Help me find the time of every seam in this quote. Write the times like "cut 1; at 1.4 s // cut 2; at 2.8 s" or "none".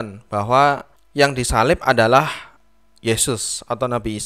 none